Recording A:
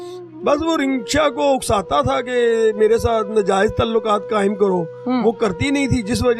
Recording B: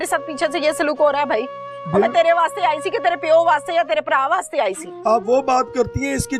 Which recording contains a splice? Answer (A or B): B